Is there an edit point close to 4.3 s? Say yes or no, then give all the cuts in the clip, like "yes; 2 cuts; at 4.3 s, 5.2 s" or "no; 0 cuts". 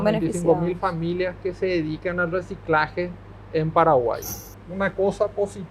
yes; 1 cut; at 4.3 s